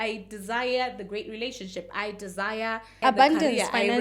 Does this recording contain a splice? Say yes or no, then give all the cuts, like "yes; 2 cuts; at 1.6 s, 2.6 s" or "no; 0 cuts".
yes; 1 cut; at 3.0 s